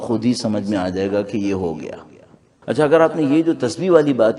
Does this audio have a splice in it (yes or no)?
yes